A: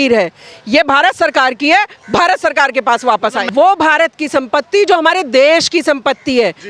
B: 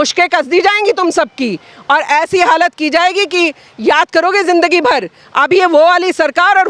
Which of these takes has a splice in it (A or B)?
A